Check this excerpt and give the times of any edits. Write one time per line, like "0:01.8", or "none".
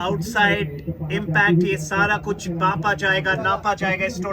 none